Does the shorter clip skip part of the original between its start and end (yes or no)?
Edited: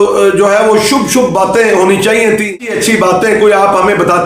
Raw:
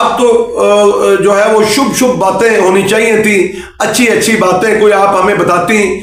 yes